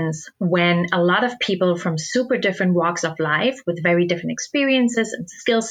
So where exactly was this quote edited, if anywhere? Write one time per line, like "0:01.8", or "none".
none